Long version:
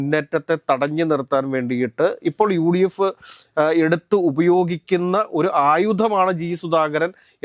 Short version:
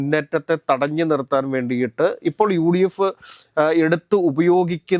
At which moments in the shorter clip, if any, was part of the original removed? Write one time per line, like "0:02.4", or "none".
none